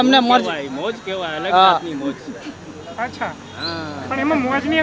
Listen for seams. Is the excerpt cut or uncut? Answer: uncut